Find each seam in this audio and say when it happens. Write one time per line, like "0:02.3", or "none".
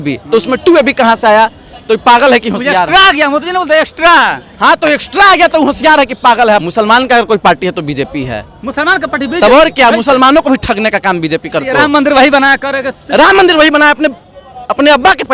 0:06.6
0:11.7